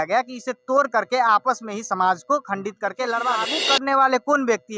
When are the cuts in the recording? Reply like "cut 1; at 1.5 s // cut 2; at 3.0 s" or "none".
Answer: cut 1; at 3.5 s

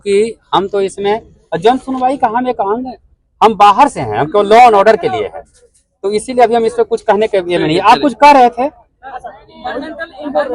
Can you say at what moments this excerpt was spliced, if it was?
none

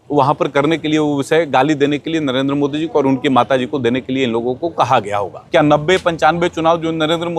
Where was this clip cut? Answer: cut 1; at 5.4 s

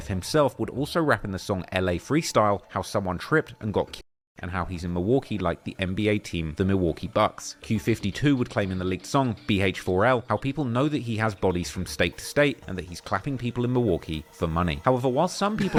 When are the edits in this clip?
none

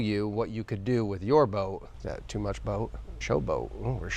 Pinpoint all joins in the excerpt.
cut 1; at 1.9 s // cut 2; at 3.1 s

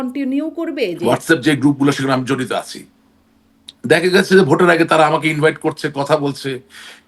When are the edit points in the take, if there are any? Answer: cut 1; at 1.0 s

